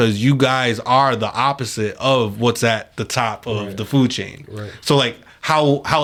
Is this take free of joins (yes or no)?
yes